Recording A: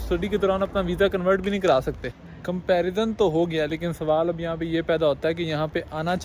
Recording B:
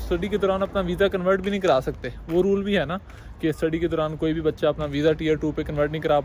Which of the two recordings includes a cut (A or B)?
A